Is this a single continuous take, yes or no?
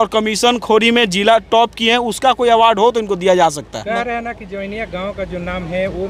yes